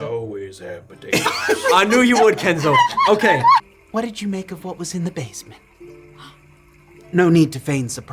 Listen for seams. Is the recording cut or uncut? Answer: cut